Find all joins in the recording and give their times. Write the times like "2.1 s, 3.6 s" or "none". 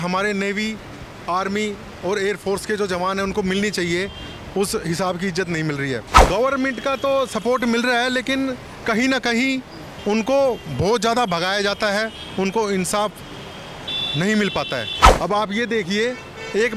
6.1 s, 15.0 s